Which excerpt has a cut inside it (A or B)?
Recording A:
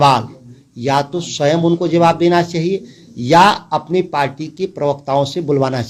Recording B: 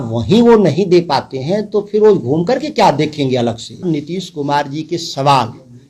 B